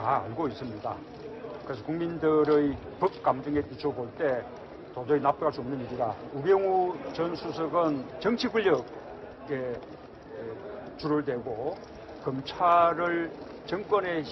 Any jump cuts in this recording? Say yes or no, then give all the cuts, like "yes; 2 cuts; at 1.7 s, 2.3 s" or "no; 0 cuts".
no; 0 cuts